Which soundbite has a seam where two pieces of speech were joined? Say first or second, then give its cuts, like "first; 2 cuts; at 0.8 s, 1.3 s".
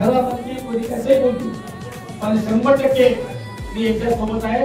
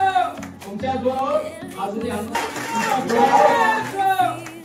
second; 1 cut; at 2.3 s